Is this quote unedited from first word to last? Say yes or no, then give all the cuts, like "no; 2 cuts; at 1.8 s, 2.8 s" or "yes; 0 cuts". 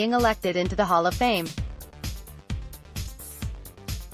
no; 1 cut; at 1.5 s